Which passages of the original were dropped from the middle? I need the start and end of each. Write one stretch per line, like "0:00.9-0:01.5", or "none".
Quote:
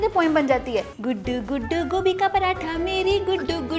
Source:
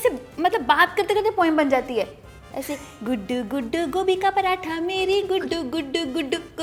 0:02.2-0:03.0